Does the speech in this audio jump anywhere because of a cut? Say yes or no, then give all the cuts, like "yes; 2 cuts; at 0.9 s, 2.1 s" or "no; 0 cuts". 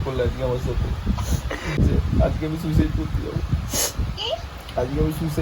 yes; 1 cut; at 1.8 s